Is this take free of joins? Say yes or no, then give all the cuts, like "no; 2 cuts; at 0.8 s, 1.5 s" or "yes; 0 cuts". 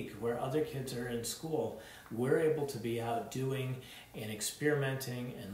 yes; 0 cuts